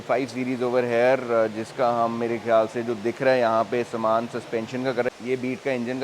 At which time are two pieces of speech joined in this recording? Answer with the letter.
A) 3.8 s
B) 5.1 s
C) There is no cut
B